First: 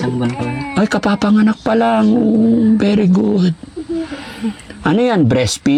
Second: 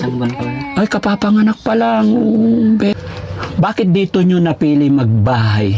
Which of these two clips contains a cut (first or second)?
second